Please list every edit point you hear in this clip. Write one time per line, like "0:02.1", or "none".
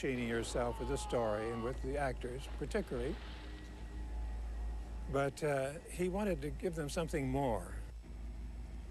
0:02.5